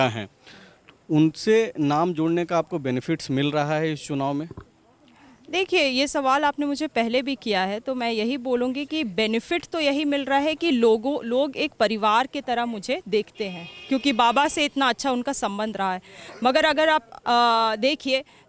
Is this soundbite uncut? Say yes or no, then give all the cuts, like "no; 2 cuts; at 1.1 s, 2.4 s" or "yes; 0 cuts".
yes; 0 cuts